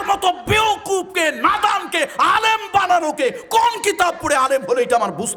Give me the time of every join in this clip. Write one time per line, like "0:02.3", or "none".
none